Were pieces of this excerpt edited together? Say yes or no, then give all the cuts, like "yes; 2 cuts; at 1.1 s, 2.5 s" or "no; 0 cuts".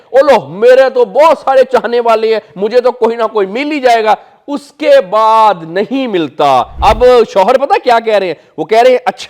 yes; 1 cut; at 6.7 s